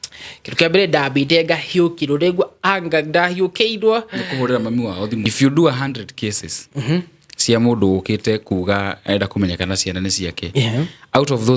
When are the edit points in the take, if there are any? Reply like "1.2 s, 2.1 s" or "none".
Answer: 5.3 s